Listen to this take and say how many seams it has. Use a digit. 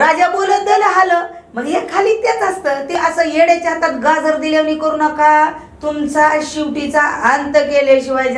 1